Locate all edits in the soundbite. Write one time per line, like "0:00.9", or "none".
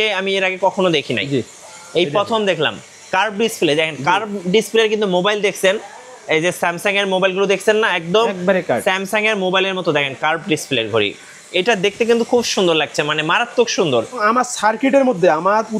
0:14.2